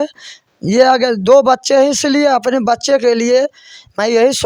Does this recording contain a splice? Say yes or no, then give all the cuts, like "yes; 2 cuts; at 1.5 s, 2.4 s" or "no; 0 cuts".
no; 0 cuts